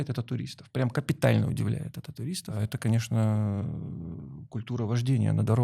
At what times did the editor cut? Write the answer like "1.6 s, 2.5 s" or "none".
2.6 s